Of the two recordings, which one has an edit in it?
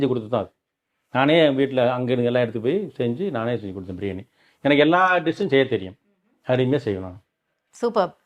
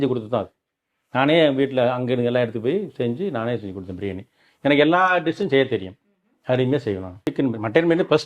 second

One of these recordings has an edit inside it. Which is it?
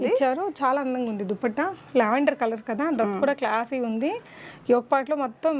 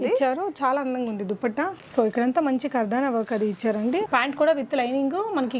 second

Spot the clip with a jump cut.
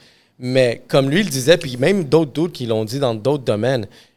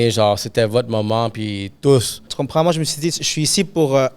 second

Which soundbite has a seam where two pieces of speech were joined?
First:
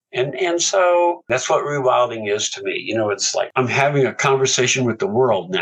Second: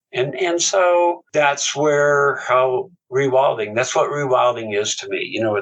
first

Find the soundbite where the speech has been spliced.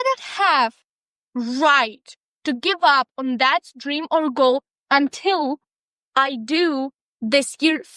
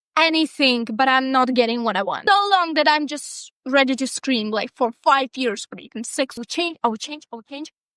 second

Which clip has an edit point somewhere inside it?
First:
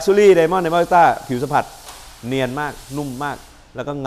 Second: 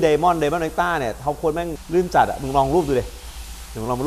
second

